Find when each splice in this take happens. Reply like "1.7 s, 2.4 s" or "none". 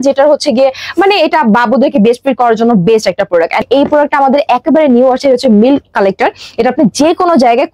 3.6 s